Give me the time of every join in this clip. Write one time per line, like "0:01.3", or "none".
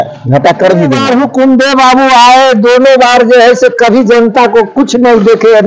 0:01.0